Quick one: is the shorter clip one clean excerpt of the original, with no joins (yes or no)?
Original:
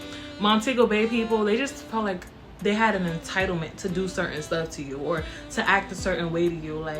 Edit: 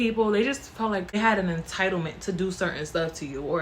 no